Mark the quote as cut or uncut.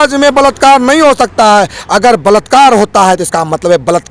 uncut